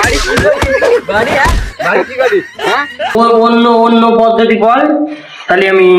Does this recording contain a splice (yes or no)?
yes